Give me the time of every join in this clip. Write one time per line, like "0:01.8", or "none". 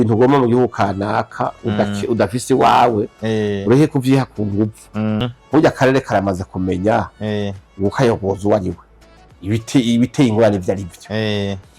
0:05.2